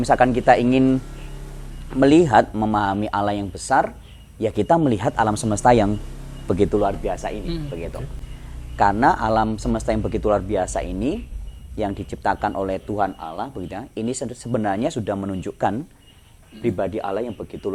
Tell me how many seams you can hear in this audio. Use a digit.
0